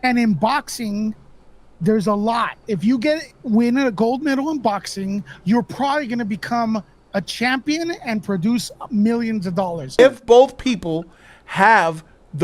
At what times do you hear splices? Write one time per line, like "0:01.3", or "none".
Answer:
0:10.0